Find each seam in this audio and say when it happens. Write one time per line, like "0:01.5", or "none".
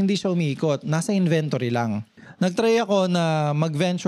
0:02.2